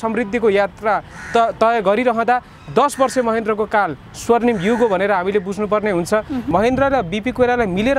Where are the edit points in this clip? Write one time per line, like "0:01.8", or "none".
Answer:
0:06.5

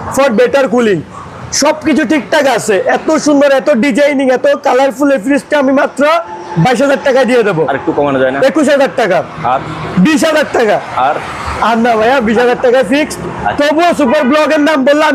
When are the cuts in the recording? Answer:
none

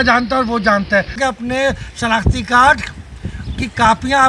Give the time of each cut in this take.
0:01.2

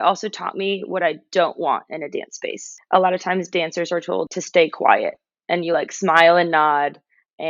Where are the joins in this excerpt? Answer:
0:02.7
0:04.3

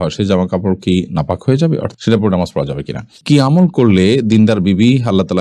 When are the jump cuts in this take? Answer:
0:02.0
0:03.2

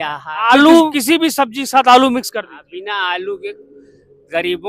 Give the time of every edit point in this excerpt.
0:01.0

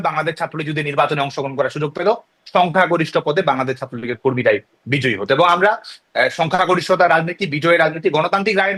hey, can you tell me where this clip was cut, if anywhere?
none

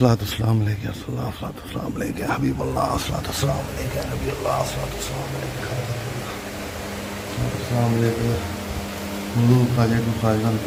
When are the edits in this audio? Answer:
none

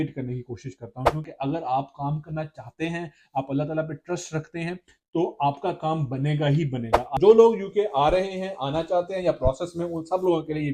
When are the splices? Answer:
0:01.2
0:07.2

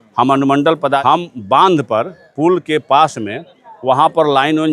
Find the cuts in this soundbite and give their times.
0:01.0

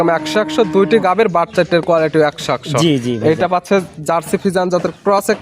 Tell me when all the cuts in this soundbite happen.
none

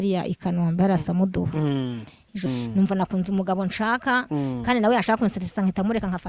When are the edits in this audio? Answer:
0:02.4

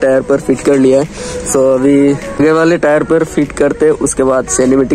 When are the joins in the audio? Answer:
0:02.3

